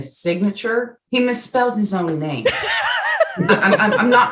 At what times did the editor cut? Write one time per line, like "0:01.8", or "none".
0:01.0